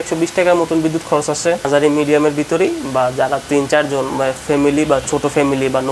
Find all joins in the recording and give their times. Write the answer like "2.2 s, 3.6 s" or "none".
1.7 s